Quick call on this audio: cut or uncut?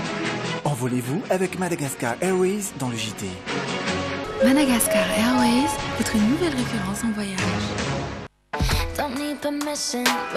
cut